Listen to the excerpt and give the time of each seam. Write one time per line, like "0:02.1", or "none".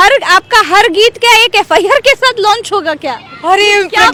none